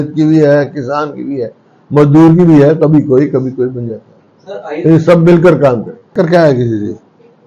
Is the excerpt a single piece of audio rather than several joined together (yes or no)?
no